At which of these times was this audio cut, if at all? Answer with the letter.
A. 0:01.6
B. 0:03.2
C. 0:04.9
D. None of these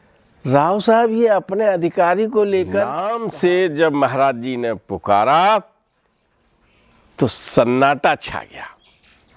B